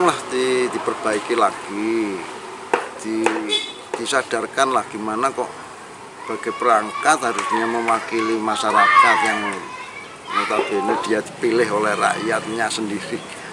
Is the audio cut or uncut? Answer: uncut